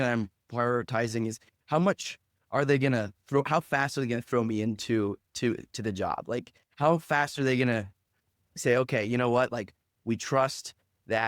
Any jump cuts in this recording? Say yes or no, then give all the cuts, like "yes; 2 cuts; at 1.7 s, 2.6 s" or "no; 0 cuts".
no; 0 cuts